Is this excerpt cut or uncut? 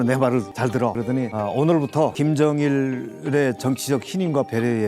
cut